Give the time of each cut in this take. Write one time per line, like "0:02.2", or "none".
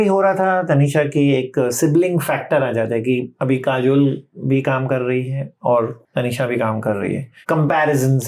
0:03.3
0:06.0
0:07.3